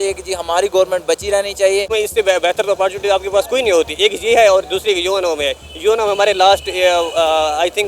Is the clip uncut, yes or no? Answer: no